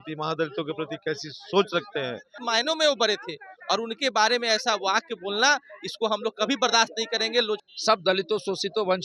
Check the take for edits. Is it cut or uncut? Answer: cut